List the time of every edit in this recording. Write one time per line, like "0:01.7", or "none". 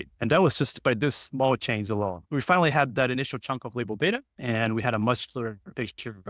0:02.2